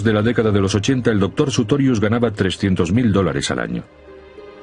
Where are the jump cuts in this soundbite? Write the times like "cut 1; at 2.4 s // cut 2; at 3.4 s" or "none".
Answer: none